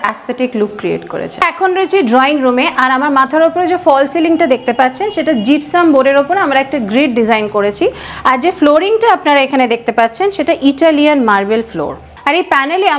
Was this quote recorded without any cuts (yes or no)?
yes